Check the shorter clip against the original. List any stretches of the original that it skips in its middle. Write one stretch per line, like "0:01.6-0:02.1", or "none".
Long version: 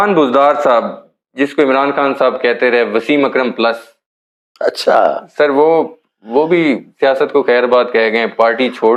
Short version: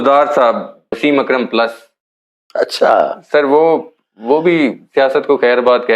0:01.3-0:03.0

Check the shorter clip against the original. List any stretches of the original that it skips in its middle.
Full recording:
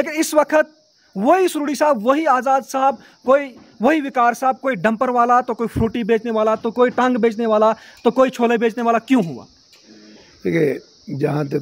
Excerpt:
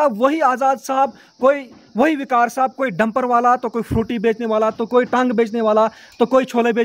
none

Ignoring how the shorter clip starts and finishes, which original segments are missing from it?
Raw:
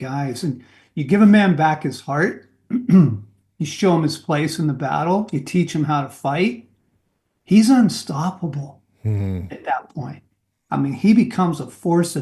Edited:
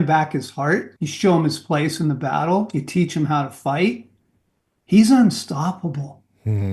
0:02.5-0:03.6

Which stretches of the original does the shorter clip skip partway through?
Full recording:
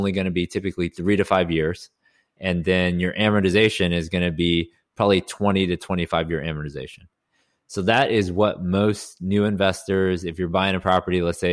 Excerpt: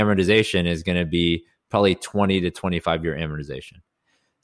none

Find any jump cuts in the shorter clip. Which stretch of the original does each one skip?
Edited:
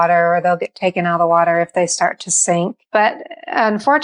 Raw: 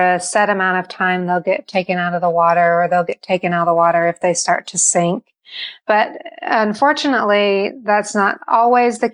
0:05.3-0:05.7

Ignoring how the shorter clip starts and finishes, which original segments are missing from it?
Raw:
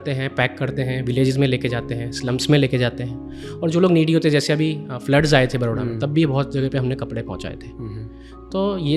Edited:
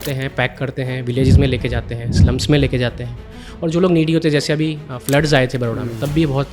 none

